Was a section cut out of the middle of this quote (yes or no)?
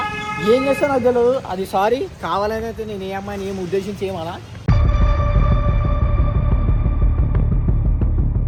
no